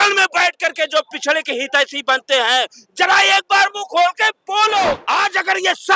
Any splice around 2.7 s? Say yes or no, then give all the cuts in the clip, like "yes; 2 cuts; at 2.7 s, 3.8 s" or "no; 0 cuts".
no; 1 cut; at 5.0 s